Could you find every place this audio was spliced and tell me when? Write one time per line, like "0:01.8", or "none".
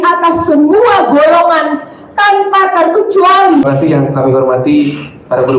0:03.7